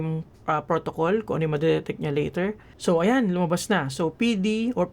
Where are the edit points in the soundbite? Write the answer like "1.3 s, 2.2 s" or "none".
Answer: 2.7 s